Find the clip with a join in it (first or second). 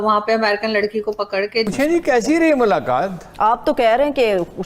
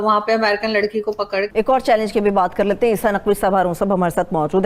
first